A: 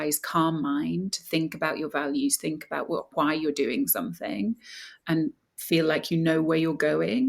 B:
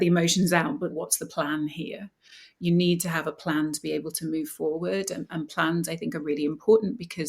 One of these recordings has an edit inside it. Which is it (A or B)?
B